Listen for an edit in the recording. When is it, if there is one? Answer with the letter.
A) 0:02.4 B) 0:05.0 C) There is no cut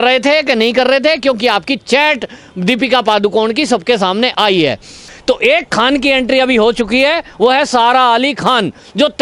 B